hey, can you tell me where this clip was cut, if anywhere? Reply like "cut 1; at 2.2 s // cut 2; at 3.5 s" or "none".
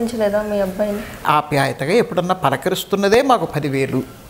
cut 1; at 1.2 s